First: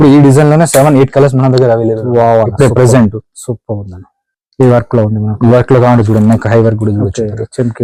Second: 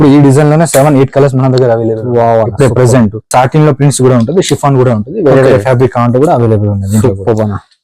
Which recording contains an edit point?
second; 1 cut; at 3.3 s

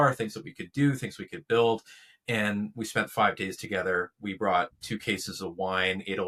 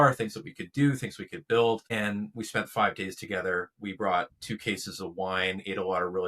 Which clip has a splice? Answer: second; 1 cut; at 1.9 s

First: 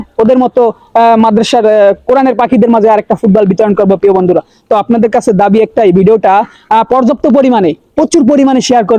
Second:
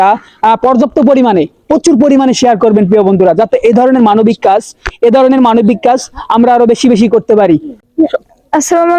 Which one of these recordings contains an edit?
second; 1 cut; at 7.8 s

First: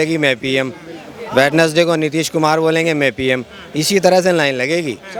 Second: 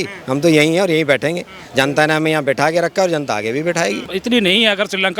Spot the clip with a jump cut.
second; 1 cut; at 4.1 s

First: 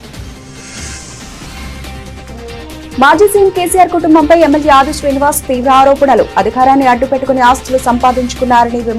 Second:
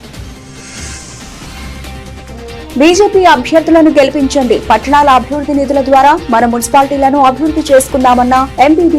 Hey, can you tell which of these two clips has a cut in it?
second; 1 cut; at 2.4 s

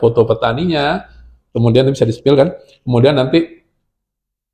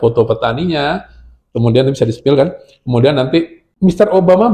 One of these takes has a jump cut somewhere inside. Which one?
second; 1 cut; at 3.6 s

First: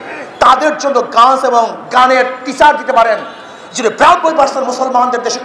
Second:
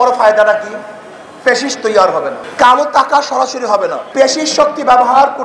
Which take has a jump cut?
second; 2 cuts; at 2.4 s, 4.0 s

